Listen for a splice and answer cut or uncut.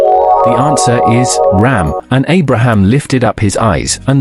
cut